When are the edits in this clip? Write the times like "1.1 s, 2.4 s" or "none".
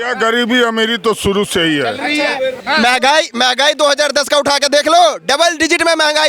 2.6 s